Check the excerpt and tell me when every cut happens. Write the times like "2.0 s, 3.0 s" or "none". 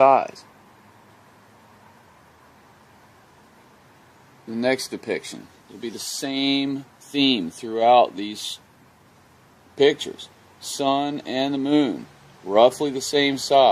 7.9 s